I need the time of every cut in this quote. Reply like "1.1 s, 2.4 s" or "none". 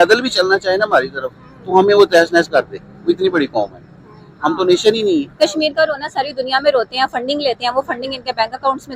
5.3 s